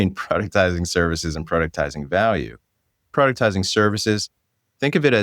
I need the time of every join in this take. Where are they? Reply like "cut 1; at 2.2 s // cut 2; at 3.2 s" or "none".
cut 1; at 3.1 s